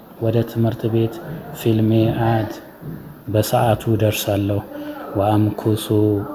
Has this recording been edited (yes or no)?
no